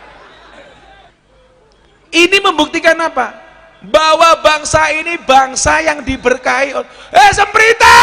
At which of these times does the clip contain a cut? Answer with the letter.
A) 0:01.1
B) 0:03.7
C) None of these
A